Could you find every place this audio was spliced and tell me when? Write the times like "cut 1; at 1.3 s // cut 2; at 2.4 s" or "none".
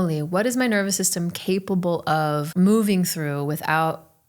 cut 1; at 2.5 s